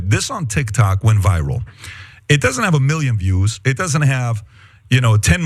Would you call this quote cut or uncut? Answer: cut